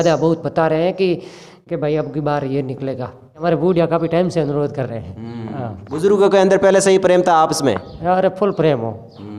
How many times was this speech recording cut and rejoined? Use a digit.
1